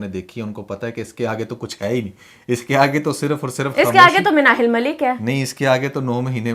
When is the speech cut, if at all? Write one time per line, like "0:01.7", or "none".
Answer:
none